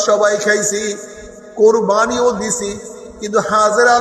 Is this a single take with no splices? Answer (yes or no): yes